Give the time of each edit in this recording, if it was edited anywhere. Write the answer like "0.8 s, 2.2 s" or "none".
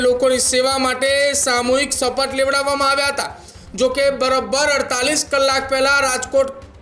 none